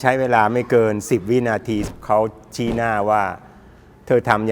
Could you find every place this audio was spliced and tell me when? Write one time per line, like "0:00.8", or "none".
0:01.8